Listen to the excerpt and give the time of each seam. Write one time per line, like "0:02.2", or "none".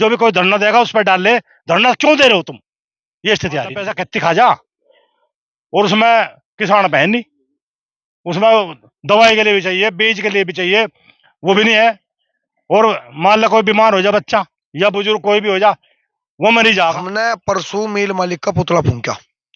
0:04.0
0:17.1